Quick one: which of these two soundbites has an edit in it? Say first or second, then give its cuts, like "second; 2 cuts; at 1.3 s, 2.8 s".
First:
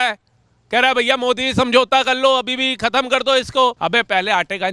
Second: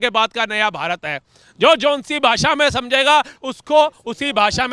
first; 1 cut; at 3.8 s